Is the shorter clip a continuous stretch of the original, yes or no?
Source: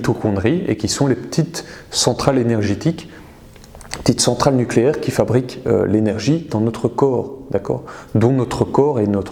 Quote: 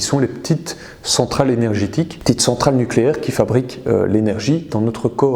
no